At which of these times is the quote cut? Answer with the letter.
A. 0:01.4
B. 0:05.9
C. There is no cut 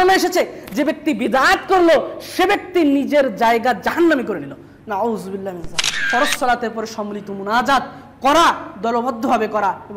B